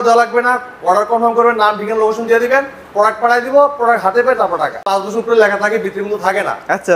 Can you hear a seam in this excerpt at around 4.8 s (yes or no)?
yes